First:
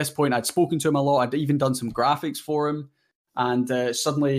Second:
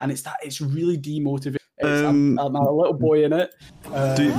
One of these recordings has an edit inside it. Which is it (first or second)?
second